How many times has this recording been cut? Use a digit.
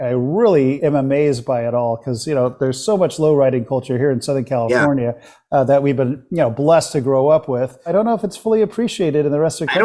2